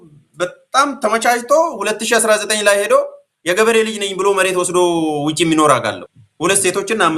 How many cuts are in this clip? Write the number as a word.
one